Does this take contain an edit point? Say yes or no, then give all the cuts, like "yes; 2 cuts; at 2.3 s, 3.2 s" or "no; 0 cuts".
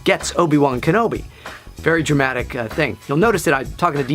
yes; 1 cut; at 1.3 s